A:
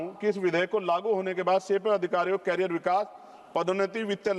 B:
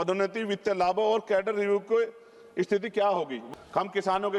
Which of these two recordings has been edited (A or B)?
B